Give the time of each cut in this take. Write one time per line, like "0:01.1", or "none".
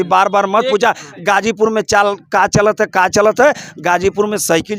none